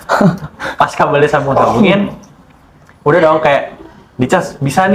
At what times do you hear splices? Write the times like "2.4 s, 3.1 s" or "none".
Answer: none